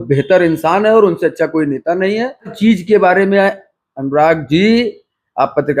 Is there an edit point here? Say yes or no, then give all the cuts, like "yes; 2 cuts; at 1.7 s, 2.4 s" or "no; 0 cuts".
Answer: yes; 1 cut; at 2.5 s